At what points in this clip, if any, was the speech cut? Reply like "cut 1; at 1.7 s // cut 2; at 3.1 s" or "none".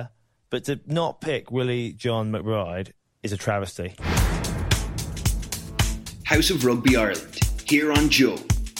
cut 1; at 4.0 s